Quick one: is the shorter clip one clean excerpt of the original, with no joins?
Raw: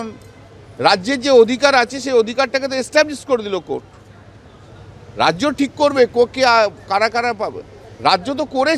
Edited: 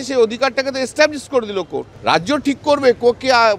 no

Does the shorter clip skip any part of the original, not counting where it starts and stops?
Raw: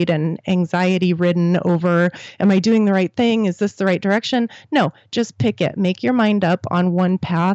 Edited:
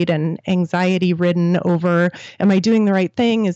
no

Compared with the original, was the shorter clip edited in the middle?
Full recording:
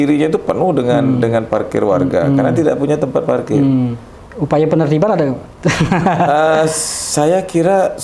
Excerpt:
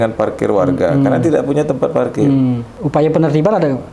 yes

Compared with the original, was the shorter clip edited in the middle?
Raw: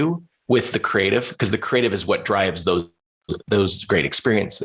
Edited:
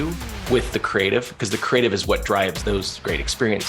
yes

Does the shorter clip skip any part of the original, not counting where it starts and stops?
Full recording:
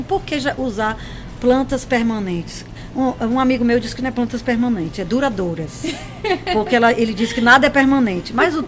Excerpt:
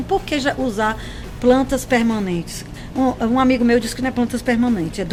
no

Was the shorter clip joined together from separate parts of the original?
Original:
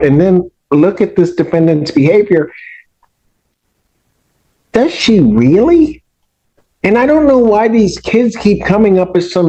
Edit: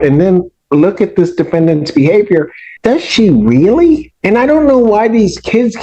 yes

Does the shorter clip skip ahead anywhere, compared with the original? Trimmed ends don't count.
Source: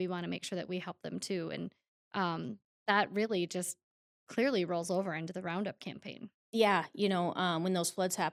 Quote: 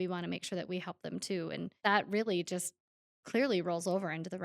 yes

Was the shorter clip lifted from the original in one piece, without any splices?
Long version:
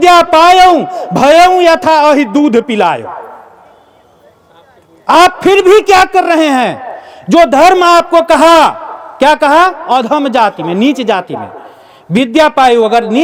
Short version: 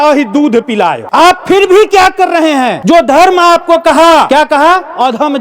no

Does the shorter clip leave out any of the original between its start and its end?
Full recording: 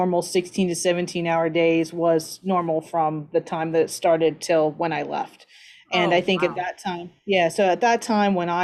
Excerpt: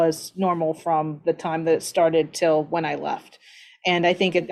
no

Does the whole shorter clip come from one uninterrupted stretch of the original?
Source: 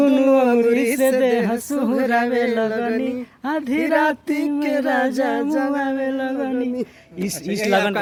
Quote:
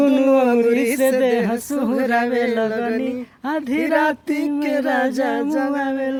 yes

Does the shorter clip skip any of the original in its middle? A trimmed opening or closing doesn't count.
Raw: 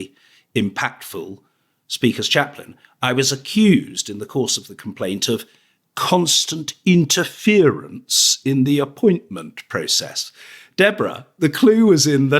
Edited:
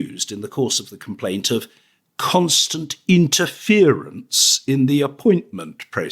no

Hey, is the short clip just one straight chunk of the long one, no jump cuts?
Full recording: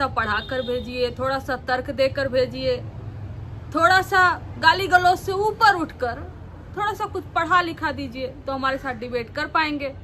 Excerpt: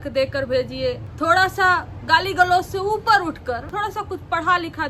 no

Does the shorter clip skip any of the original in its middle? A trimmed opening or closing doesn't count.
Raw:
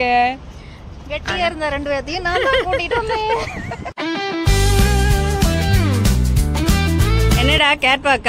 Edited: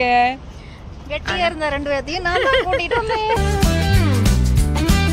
yes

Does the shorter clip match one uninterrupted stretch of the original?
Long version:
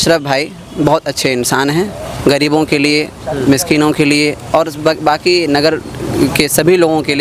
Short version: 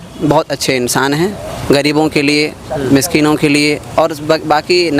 yes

